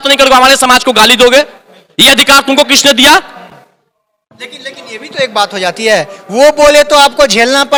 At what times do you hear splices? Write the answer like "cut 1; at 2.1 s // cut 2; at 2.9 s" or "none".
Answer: none